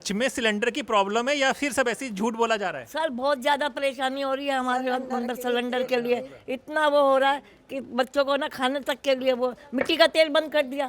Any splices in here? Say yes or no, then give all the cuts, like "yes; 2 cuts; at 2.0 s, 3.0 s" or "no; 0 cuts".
no; 0 cuts